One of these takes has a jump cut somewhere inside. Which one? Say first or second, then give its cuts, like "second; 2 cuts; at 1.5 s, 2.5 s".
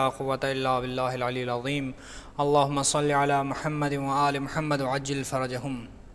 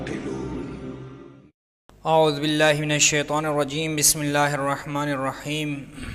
second; 1 cut; at 1.8 s